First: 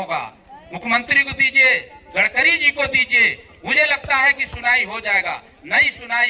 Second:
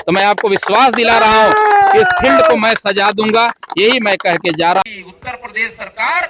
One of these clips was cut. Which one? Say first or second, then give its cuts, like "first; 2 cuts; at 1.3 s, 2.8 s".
second; 1 cut; at 4.8 s